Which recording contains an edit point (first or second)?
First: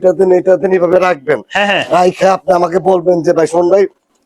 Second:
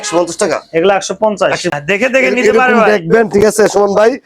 second